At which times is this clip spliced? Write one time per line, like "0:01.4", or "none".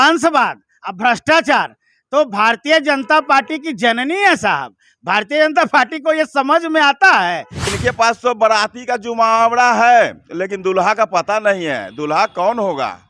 0:07.7